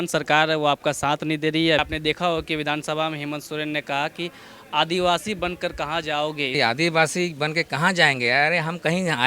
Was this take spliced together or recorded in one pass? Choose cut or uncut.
cut